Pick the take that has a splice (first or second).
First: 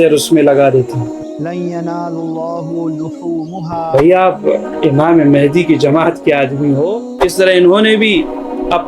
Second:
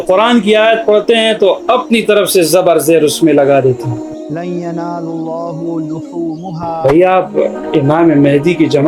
first